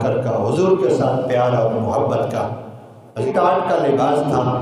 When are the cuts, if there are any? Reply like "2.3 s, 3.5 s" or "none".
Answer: 3.3 s